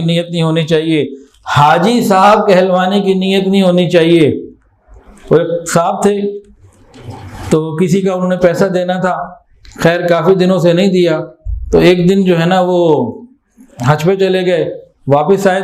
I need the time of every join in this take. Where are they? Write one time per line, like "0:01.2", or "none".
none